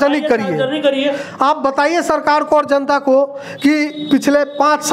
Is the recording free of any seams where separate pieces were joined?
yes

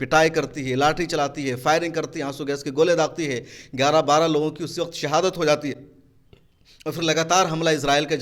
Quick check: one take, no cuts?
yes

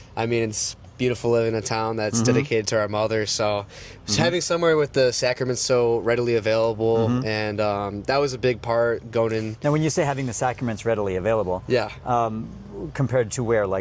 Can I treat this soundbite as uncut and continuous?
yes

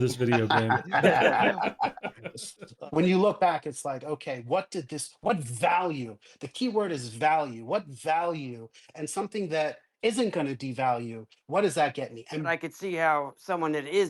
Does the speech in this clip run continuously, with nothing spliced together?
no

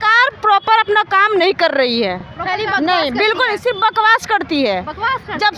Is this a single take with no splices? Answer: yes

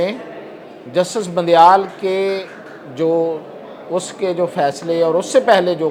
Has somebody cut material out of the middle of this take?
no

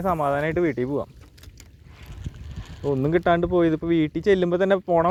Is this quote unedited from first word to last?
yes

